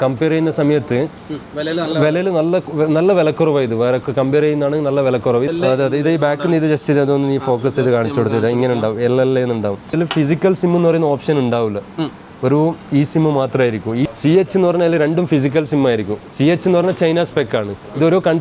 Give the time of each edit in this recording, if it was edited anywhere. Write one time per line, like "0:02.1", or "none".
0:05.5
0:09.9
0:14.1
0:16.2